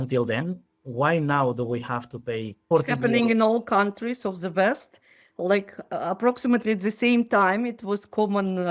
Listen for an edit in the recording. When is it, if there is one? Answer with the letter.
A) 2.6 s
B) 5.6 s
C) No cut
A